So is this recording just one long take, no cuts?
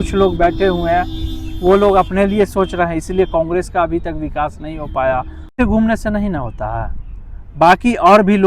no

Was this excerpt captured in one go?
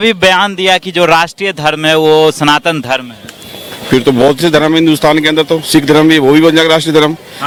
yes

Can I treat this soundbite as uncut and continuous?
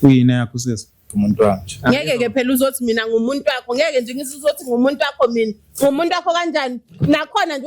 no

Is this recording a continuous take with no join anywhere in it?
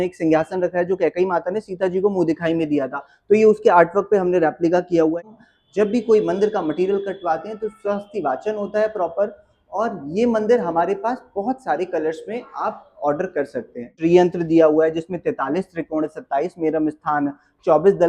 no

